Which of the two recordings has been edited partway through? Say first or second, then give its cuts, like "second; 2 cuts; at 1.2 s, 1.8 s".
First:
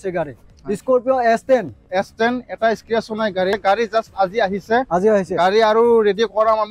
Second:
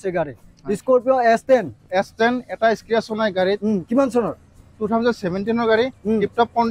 first; 1 cut; at 3.5 s